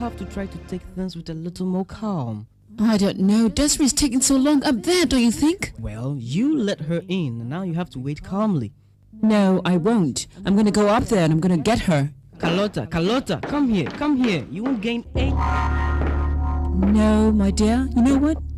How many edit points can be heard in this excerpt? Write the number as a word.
zero